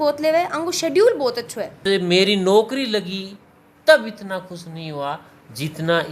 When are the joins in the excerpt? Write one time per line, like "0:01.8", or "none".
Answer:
0:01.8